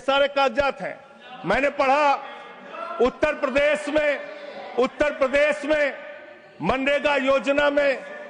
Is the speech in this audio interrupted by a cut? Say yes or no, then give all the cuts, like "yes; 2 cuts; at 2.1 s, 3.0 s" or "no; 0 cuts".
no; 0 cuts